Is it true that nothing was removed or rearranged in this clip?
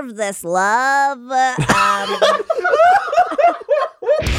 yes; 0 cuts

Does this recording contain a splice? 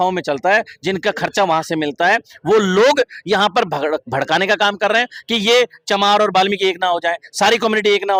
no; 0 cuts

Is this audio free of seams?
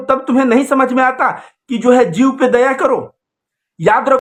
yes; 0 cuts

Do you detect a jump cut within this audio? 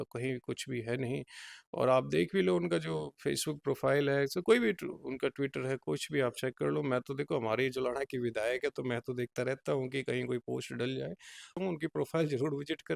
yes; 1 cut; at 11.6 s

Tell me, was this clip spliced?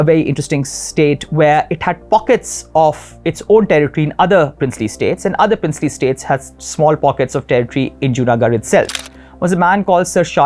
yes; 1 cut; at 9.0 s

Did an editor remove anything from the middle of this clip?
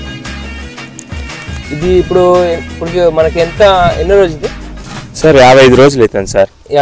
no; 0 cuts

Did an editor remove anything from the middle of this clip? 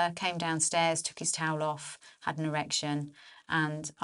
no; 0 cuts

